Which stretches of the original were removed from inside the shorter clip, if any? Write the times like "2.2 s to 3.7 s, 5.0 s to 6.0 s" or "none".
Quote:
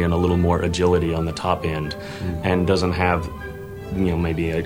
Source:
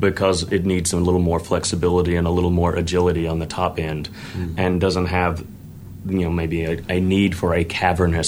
none